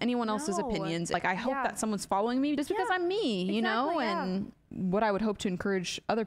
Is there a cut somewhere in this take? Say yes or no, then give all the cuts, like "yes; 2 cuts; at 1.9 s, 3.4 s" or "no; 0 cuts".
yes; 3 cuts; at 1.1 s, 2.6 s, 4.6 s